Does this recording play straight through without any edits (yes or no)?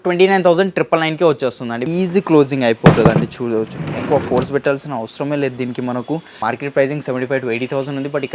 no